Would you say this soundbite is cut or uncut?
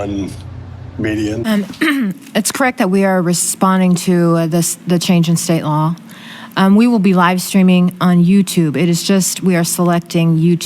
cut